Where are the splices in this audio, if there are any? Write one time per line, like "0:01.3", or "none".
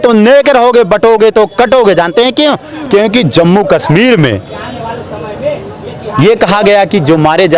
none